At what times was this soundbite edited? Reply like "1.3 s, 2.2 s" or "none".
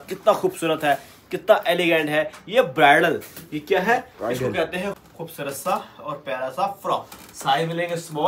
5.0 s

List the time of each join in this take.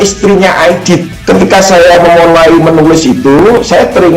1.1 s

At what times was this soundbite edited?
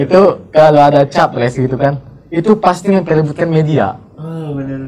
none

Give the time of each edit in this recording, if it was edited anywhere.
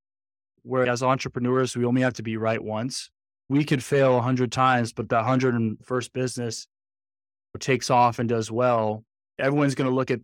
0.9 s, 3.5 s, 7.4 s

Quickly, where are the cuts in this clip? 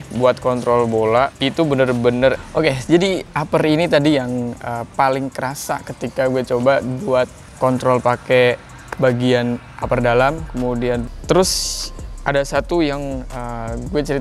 2.3 s, 11.0 s

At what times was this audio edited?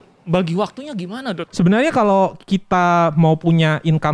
1.4 s

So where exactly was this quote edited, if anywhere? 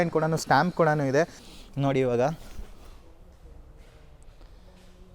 1.4 s

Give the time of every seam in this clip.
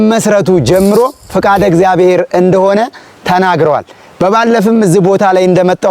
none

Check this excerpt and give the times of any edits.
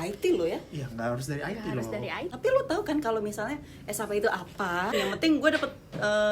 2.3 s, 4.9 s

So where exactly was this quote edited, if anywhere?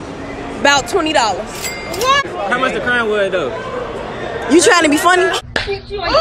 2.2 s

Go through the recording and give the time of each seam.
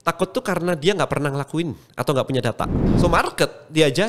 2.9 s

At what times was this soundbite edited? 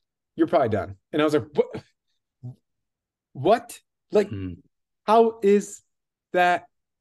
none

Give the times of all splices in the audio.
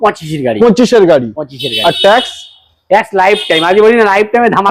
none

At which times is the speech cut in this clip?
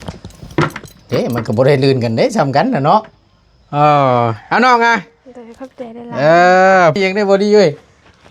6.9 s

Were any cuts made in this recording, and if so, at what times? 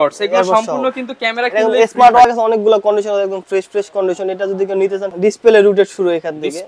2.2 s, 5.1 s

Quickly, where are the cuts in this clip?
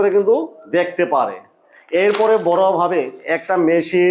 none

